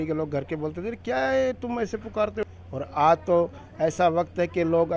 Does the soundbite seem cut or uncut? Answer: cut